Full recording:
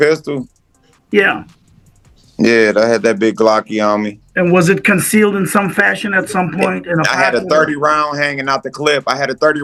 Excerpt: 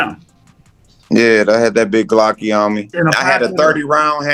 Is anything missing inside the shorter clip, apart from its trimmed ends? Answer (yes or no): yes